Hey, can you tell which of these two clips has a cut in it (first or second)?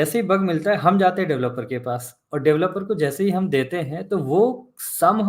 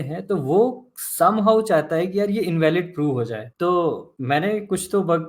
second